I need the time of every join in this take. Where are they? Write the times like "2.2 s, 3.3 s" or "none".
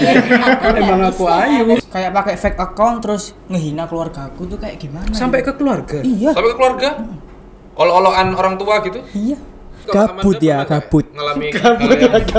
1.8 s, 9.8 s